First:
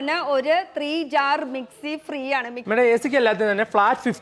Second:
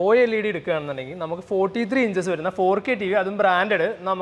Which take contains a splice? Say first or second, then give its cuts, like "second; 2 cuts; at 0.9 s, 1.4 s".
first; 1 cut; at 2.6 s